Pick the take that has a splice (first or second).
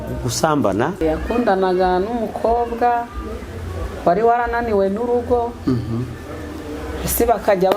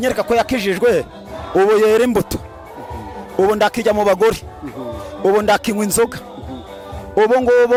first